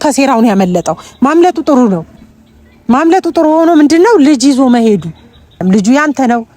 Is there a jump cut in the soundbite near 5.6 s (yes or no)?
yes